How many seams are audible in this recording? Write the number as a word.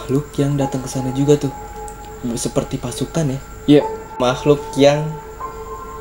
one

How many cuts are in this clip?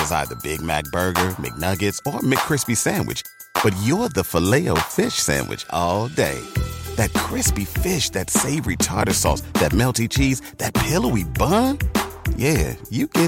zero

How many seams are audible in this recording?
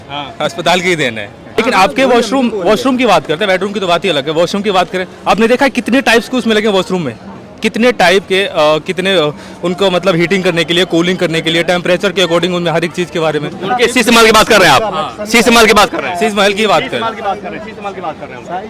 one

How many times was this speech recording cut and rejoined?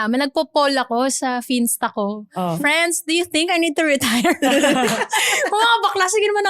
zero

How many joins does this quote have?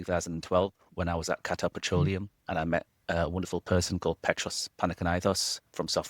one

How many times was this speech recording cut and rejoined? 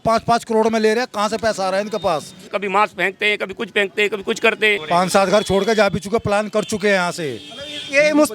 two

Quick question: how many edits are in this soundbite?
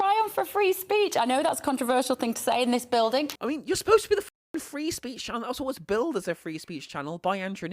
one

